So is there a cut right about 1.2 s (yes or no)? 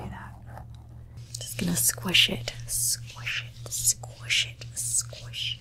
yes